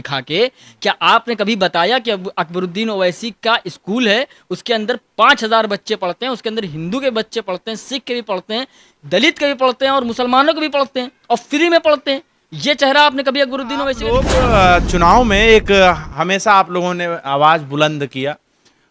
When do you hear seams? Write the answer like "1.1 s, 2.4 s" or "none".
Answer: 14.0 s